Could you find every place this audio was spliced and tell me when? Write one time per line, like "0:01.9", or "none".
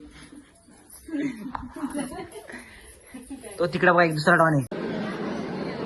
0:04.8